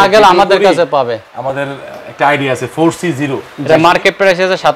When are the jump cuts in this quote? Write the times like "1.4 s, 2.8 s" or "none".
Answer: 3.5 s